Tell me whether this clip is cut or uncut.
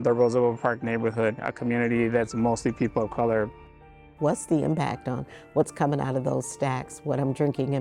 cut